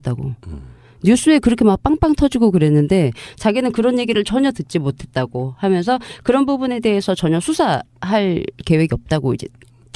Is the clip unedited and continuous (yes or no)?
no